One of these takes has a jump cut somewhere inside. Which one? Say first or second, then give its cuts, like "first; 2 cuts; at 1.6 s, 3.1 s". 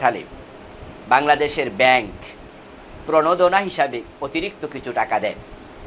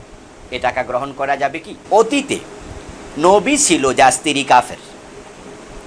second; 1 cut; at 1.8 s